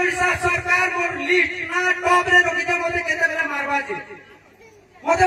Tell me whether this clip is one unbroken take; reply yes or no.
yes